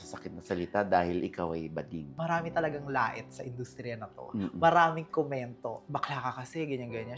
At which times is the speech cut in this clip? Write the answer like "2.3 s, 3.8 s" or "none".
2.1 s, 5.8 s